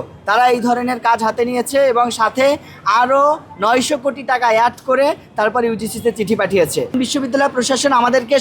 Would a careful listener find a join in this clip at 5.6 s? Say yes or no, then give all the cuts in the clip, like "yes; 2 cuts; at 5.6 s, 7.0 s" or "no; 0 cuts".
no; 1 cut; at 6.9 s